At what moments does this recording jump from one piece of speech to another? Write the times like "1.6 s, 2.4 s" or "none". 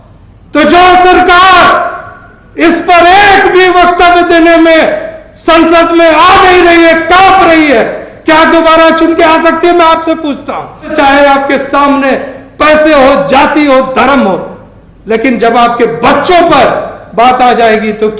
10.9 s